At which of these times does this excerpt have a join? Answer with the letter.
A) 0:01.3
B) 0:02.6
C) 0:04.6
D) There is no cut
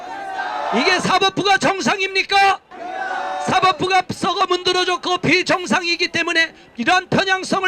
D